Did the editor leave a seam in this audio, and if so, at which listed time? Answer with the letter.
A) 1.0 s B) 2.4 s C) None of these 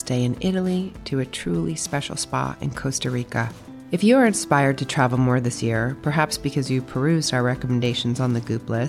C